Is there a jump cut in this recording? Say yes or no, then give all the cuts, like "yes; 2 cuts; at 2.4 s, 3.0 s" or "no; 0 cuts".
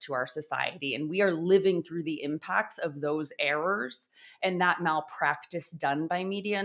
no; 0 cuts